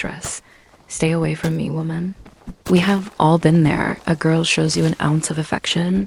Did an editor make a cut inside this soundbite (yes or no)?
no